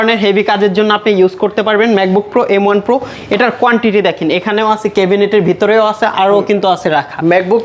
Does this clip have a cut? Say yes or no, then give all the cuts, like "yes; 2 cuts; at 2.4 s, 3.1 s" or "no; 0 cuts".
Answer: no; 0 cuts